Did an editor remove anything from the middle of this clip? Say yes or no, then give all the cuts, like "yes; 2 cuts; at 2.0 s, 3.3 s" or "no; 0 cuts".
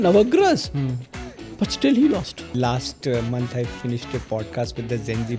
yes; 1 cut; at 2.5 s